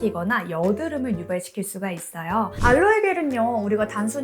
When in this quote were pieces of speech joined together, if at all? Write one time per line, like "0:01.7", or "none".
0:02.5